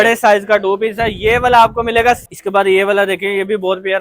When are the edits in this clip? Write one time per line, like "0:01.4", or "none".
0:02.3